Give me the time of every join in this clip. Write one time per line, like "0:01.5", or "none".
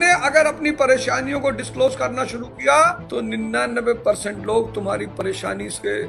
0:03.0